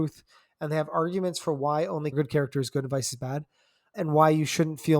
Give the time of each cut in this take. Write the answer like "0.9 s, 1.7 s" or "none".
2.1 s, 3.9 s